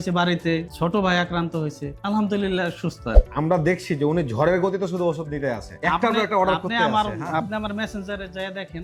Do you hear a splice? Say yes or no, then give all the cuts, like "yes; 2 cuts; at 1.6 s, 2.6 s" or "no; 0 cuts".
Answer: no; 0 cuts